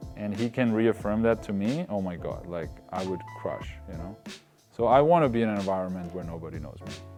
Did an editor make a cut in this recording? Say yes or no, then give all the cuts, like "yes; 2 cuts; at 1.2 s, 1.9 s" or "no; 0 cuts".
no; 0 cuts